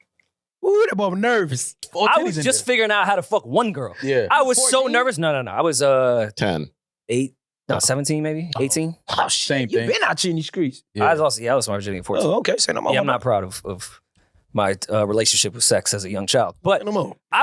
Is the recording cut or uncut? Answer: cut